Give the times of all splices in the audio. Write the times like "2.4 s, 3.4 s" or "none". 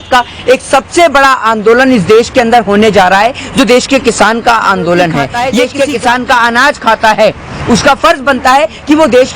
5.4 s